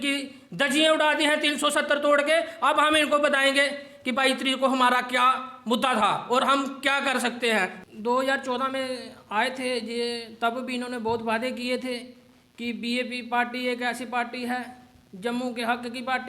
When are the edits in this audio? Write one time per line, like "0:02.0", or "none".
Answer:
0:07.8